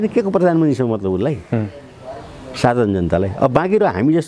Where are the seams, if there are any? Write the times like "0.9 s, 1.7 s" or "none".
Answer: none